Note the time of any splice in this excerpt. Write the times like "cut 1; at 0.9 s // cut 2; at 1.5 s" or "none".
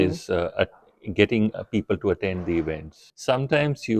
cut 1; at 3.0 s